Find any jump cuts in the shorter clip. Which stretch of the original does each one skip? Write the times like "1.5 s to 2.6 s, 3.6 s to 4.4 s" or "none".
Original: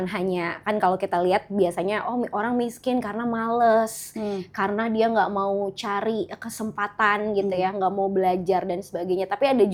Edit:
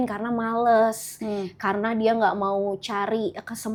none